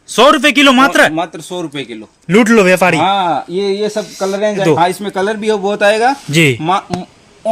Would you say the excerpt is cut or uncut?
cut